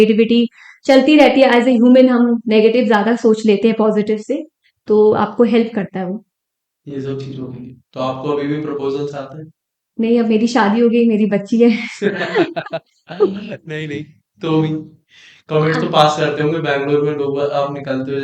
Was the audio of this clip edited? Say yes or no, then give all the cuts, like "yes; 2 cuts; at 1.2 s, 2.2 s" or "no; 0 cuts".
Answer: no; 0 cuts